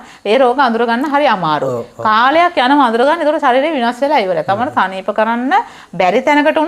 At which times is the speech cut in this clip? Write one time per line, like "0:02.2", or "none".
none